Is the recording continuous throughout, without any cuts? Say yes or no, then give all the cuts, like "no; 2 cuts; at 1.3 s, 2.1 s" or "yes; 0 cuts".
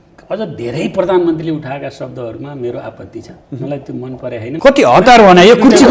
no; 1 cut; at 4.5 s